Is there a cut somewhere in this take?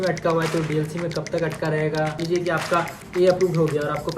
yes; 1 cut; at 2.2 s

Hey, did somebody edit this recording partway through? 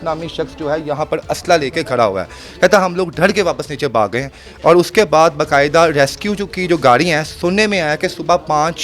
no; 0 cuts

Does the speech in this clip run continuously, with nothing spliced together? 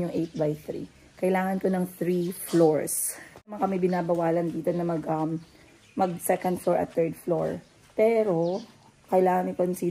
no; 1 cut; at 3.5 s

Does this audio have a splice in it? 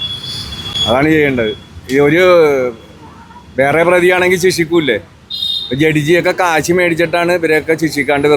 no; 0 cuts

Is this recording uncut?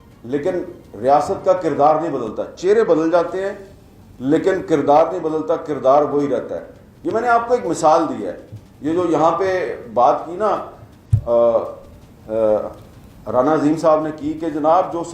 yes; 0 cuts

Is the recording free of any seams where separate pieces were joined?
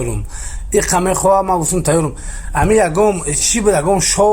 yes; 0 cuts

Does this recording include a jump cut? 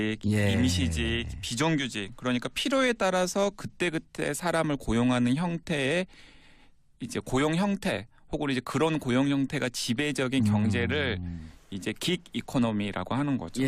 yes; 1 cut; at 5.5 s

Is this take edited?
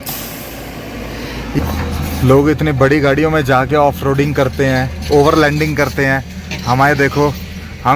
yes; 1 cut; at 1.6 s

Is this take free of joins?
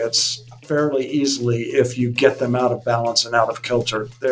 yes; 0 cuts

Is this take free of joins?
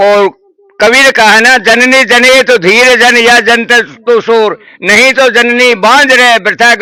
yes; 0 cuts

